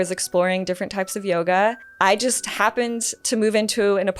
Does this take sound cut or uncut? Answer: cut